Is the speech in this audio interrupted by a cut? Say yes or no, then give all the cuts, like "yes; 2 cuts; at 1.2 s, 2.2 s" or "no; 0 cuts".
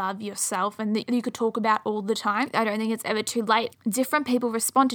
yes; 3 cuts; at 1.0 s, 2.5 s, 3.7 s